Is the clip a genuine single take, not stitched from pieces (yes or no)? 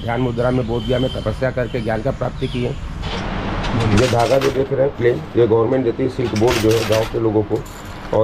no